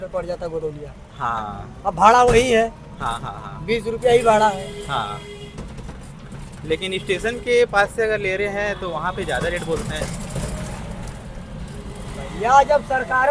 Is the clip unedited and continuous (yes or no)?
yes